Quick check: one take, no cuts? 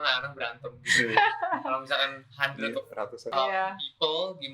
no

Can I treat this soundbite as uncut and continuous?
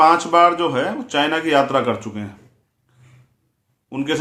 yes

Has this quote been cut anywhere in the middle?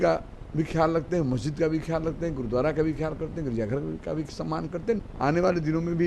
yes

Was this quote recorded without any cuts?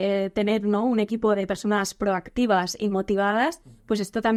yes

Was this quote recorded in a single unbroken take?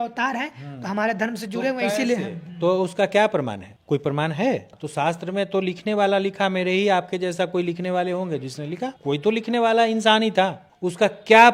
yes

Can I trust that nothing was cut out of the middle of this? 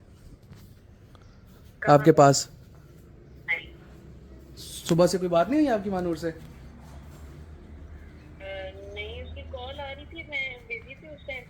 yes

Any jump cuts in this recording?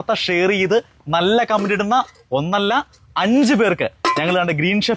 no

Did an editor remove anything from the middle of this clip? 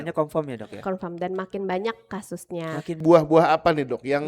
yes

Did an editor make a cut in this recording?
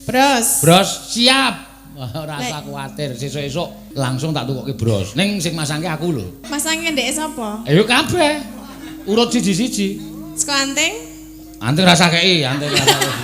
yes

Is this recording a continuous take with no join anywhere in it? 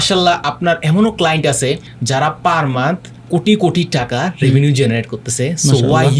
yes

